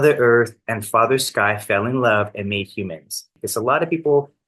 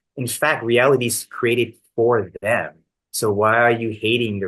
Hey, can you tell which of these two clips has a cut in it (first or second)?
first